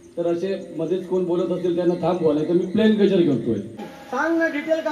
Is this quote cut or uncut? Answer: cut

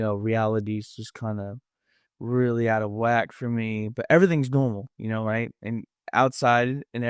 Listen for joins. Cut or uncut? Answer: uncut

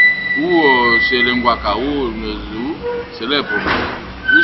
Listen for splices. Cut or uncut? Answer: uncut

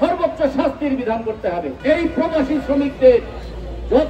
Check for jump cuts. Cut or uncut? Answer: cut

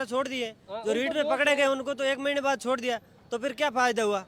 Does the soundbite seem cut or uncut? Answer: uncut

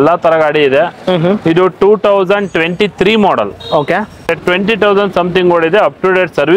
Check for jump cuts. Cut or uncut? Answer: cut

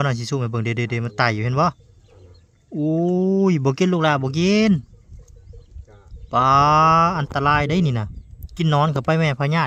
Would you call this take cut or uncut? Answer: uncut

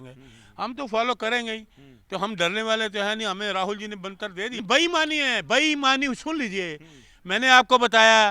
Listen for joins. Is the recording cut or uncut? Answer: cut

